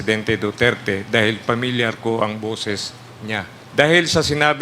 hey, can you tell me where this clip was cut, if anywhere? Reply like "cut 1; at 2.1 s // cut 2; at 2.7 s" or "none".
cut 1; at 3.6 s